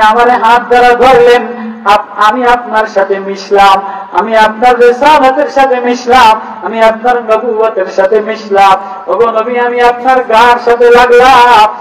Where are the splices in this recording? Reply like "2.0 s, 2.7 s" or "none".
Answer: none